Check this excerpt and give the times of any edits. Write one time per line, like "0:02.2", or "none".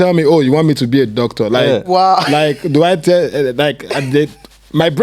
none